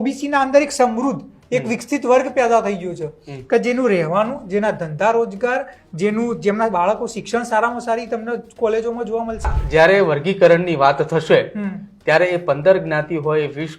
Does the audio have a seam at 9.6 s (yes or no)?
yes